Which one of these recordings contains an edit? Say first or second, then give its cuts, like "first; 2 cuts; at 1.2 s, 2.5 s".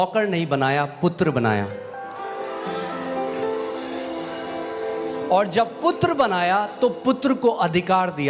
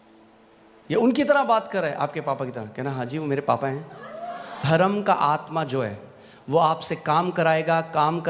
second; 1 cut; at 4.6 s